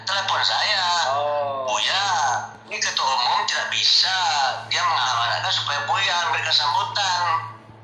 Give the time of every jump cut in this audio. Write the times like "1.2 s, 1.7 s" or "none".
none

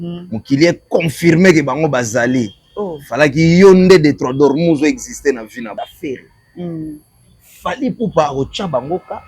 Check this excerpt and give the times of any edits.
5.7 s

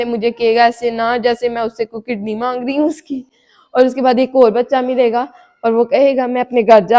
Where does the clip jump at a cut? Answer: none

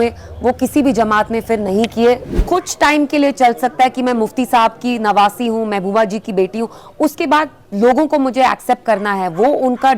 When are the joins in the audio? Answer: 2.4 s

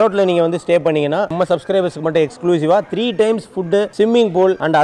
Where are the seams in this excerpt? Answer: 1.3 s

